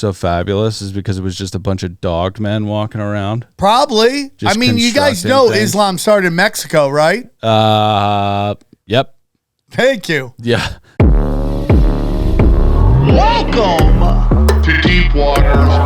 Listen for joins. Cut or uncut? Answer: cut